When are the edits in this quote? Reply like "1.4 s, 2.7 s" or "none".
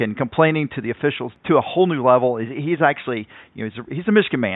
1.3 s